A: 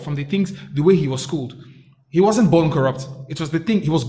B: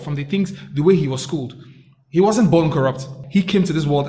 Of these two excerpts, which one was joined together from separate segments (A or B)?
B